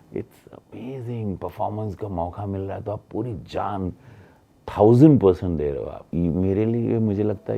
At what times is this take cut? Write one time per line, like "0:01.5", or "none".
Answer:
0:06.0